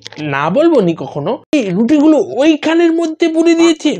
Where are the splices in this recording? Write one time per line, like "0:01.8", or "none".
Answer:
0:01.5